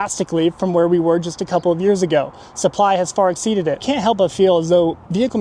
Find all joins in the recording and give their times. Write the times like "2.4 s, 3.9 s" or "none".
3.8 s